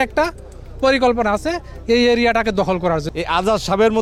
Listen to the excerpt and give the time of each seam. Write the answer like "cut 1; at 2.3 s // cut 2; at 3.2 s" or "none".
cut 1; at 3.1 s